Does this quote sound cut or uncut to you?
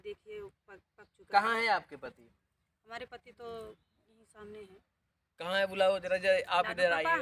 uncut